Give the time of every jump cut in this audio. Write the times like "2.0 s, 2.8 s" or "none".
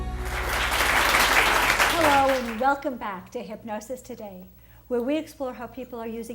2.6 s